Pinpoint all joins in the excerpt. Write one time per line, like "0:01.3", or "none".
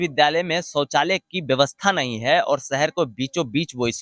none